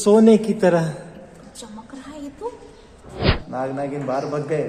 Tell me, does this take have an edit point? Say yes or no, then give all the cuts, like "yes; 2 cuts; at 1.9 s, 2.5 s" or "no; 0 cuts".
yes; 1 cut; at 3.3 s